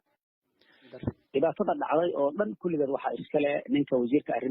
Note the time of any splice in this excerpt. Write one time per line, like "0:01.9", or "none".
0:00.9